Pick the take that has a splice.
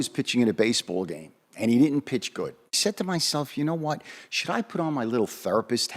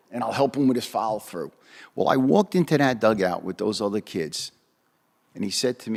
first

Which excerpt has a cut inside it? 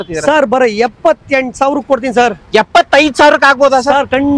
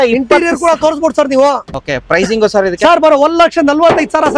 second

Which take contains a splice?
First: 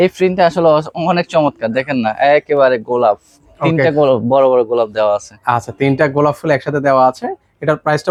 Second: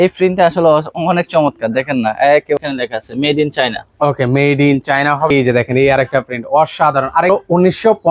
second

